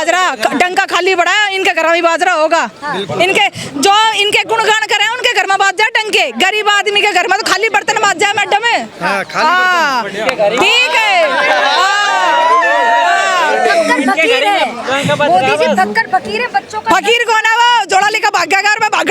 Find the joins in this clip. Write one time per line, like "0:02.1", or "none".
none